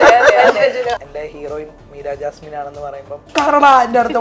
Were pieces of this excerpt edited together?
yes; 2 cuts; at 0.9 s, 3.3 s

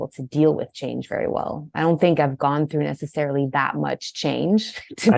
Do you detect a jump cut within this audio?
no; 0 cuts

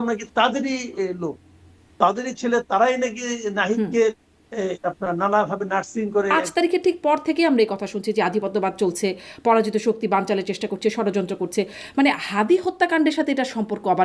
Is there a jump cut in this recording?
yes; 1 cut; at 6.3 s

